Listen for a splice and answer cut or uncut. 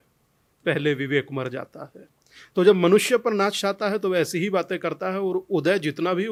uncut